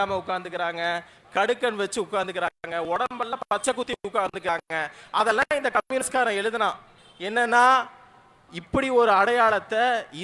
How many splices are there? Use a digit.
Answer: 0